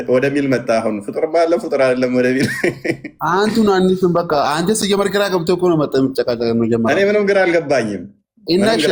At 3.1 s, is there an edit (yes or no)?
no